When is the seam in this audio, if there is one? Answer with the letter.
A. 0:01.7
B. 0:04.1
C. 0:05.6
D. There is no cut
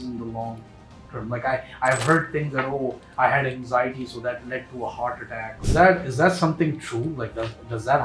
C